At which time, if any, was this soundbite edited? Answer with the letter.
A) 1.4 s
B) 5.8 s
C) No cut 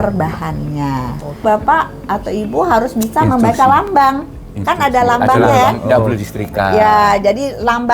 A